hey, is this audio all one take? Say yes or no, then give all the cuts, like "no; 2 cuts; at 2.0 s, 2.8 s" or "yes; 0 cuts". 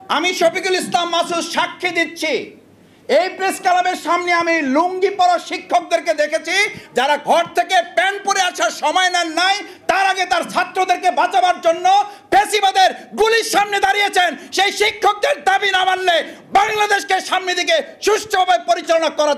yes; 0 cuts